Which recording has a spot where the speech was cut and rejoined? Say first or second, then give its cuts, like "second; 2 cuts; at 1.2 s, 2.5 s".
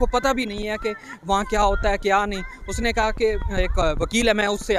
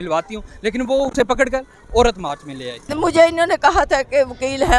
second; 1 cut; at 2.8 s